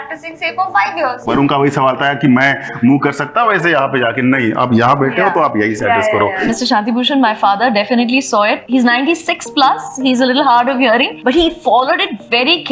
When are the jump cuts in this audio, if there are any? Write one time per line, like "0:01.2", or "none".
0:01.3
0:06.5
0:08.6
0:11.1

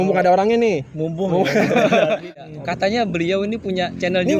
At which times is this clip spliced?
0:02.3

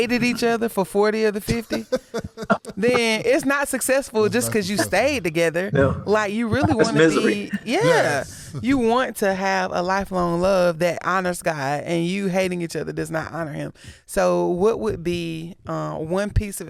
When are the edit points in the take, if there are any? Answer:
none

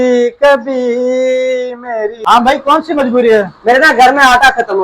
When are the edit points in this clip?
0:02.1

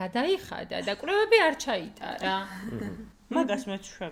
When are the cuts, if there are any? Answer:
none

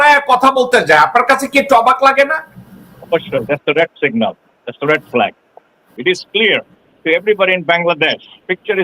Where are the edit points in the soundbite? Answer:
0:05.8

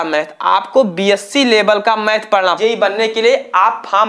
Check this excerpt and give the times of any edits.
0:02.6

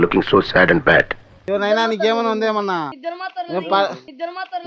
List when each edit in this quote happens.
0:02.9

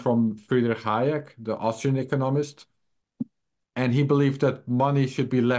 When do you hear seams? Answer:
none

